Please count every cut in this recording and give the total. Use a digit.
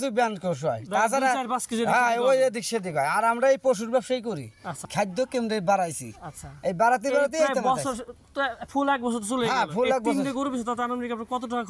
1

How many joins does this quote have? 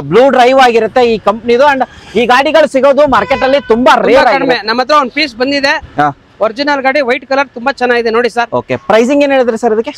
0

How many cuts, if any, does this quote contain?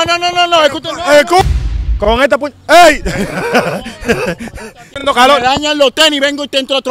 2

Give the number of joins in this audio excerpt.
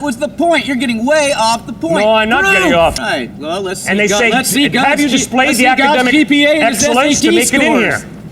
1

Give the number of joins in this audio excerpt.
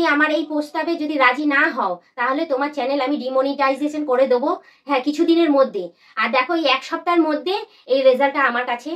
0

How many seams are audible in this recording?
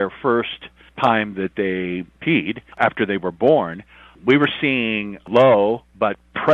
1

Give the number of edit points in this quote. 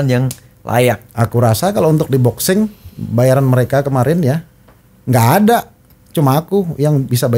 0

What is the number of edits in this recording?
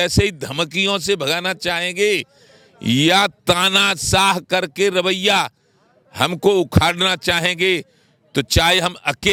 0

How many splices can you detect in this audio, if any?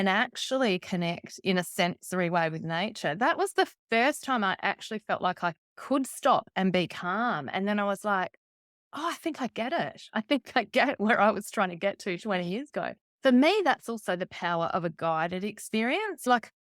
1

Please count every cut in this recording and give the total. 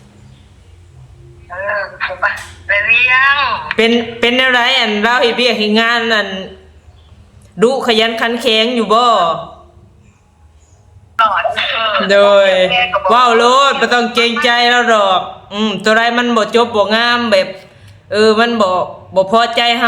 1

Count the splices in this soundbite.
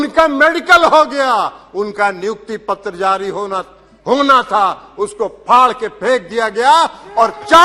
0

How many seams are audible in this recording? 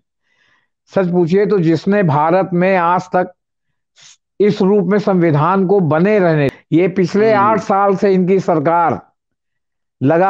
1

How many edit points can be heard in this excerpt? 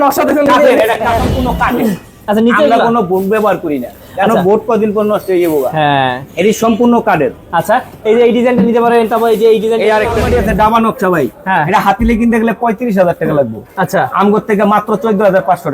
2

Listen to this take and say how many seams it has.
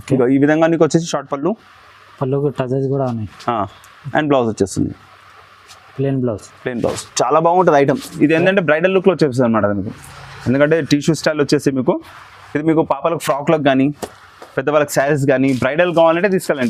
0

